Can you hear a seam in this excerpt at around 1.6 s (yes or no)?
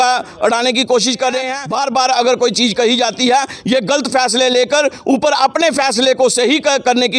yes